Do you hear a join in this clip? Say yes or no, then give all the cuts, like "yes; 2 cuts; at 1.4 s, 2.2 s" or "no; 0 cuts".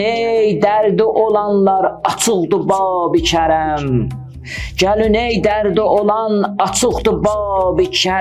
no; 0 cuts